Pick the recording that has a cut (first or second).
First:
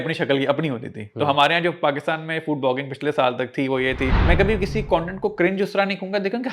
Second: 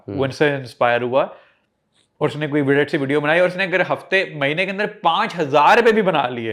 first